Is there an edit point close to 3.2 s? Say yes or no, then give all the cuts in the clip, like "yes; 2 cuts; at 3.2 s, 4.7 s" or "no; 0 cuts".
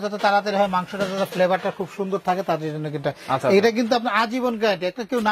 no; 0 cuts